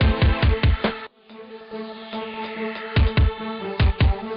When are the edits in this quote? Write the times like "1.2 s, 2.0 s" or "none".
1.0 s